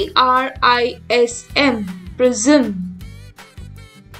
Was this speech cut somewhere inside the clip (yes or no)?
yes